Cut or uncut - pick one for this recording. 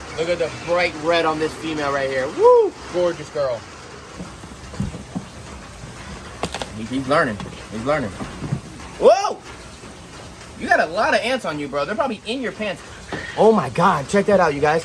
cut